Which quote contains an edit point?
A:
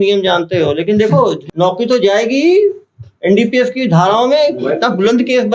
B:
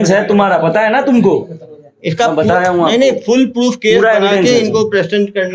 A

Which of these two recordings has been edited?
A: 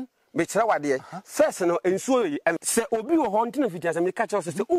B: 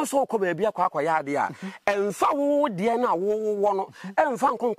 A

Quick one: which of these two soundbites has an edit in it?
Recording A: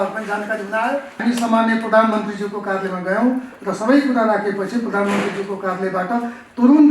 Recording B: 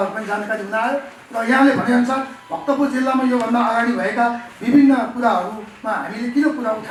A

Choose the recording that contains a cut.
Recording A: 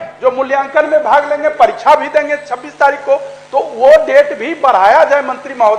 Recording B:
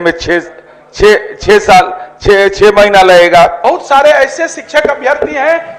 B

